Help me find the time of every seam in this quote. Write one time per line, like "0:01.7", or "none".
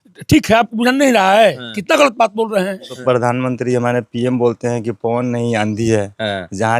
0:02.9